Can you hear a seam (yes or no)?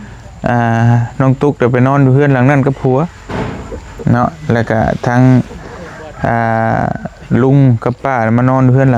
no